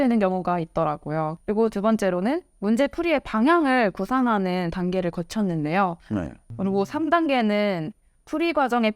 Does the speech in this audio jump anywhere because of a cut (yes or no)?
yes